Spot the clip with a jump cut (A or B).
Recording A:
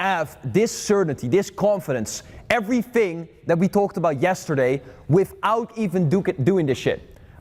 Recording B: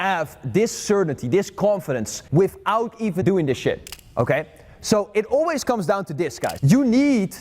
B